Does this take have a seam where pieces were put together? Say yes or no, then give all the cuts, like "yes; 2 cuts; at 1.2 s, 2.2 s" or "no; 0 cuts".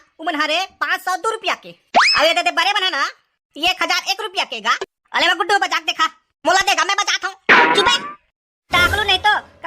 yes; 1 cut; at 4.8 s